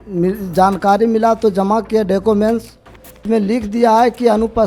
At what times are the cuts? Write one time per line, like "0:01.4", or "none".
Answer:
0:03.2